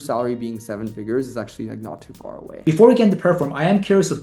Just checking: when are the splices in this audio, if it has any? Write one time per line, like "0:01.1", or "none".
0:02.6

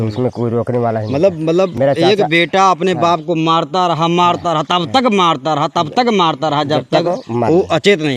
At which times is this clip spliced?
none

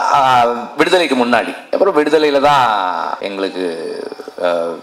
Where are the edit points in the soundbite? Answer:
0:01.7
0:03.2

